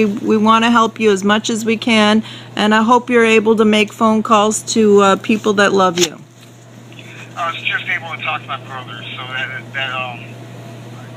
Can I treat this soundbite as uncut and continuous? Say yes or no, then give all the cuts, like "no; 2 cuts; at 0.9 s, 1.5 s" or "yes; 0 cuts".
yes; 0 cuts